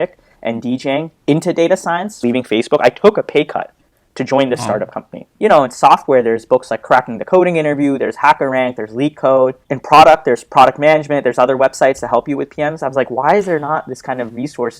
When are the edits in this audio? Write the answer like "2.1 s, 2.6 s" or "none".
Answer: 2.2 s, 5.2 s